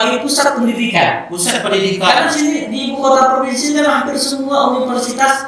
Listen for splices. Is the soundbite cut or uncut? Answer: uncut